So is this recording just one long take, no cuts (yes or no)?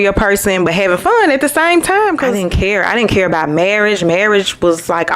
no